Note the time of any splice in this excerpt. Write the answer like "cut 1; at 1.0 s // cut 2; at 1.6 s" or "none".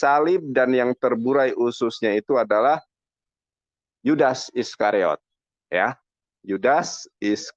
none